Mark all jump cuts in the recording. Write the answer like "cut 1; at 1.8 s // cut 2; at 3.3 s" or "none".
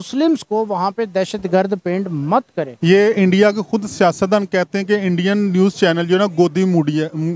cut 1; at 2.7 s

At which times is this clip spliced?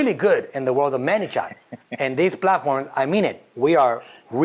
none

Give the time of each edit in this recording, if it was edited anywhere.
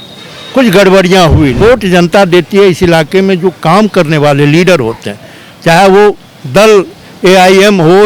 cut 1; at 1.6 s

